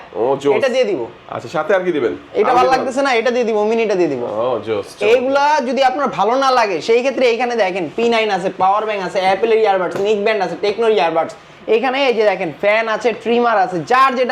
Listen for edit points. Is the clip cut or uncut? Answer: uncut